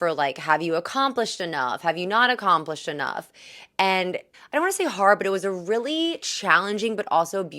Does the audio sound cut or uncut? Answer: cut